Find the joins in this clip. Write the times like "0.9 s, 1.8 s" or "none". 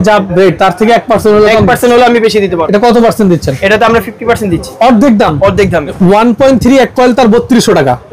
2.6 s, 5.9 s